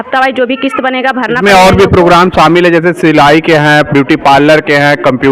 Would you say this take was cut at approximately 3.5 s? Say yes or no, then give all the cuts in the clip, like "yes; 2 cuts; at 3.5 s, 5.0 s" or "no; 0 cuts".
no; 1 cut; at 1.3 s